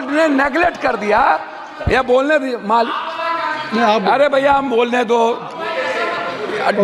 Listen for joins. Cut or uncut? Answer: uncut